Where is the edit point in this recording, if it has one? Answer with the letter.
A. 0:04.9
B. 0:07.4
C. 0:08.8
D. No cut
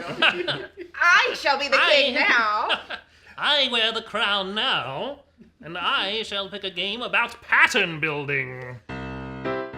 C